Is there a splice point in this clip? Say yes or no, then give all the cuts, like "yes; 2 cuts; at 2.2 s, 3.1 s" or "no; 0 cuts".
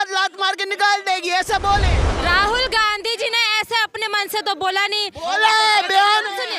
yes; 1 cut; at 2.0 s